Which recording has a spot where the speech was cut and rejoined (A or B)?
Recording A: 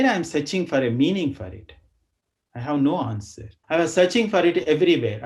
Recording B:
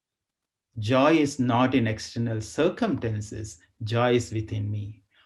A